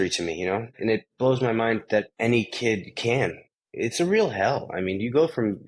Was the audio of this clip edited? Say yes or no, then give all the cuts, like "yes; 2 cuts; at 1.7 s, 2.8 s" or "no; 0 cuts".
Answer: yes; 3 cuts; at 0.8 s, 2.1 s, 3.5 s